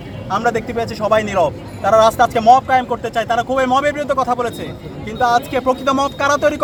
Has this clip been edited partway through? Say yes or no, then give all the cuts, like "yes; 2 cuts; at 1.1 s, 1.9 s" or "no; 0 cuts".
no; 0 cuts